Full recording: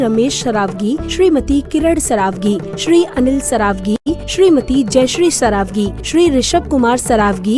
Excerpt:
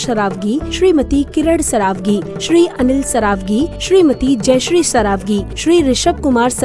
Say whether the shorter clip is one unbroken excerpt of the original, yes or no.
no